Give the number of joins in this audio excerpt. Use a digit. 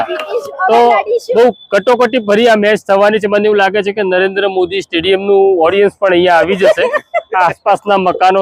0